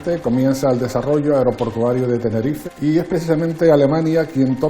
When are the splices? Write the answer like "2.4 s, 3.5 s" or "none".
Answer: 2.6 s